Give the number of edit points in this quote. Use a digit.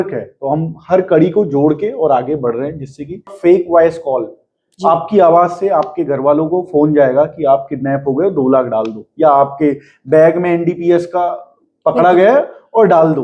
1